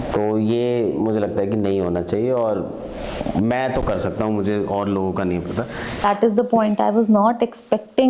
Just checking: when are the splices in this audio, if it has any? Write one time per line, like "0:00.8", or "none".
0:06.0